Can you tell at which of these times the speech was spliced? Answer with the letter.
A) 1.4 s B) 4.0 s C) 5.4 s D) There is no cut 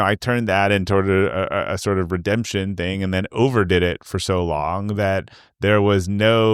D